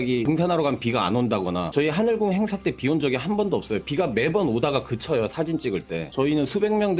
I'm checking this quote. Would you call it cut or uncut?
cut